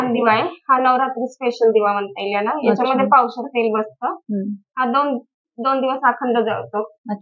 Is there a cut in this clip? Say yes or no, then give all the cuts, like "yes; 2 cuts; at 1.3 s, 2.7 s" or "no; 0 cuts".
no; 0 cuts